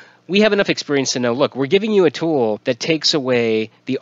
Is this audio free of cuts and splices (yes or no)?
no